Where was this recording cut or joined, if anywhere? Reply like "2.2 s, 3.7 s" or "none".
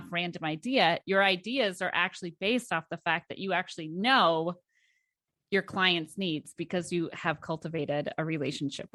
none